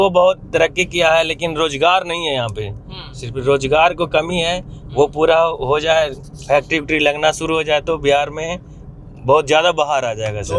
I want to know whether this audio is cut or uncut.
uncut